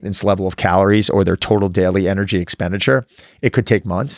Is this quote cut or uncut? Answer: uncut